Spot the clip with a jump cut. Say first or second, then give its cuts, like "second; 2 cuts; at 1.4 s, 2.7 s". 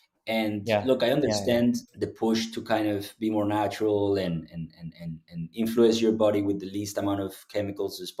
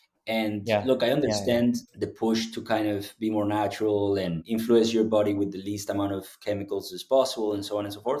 second; 1 cut; at 4.4 s